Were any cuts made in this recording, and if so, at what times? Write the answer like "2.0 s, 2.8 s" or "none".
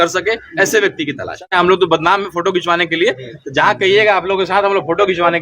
1.2 s